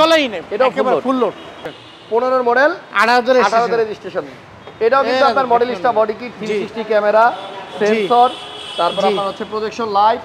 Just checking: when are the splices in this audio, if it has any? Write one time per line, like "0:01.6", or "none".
0:01.5